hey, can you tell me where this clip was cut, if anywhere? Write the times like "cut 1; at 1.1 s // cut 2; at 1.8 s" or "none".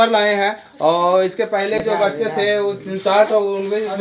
none